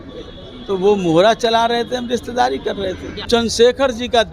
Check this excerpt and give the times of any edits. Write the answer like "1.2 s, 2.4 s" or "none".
3.1 s